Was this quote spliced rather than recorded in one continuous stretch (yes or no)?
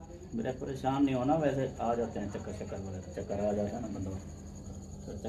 no